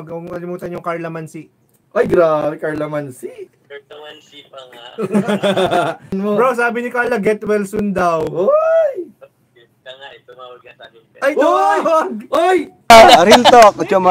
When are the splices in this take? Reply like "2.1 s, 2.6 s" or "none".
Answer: 3.6 s, 6.2 s, 12.7 s